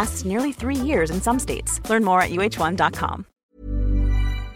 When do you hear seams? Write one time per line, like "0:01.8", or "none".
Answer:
0:03.4